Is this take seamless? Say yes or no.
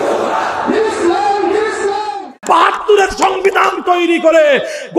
no